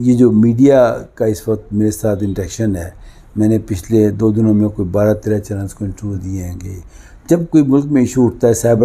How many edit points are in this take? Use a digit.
0